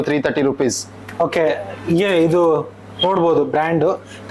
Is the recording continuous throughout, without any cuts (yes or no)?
yes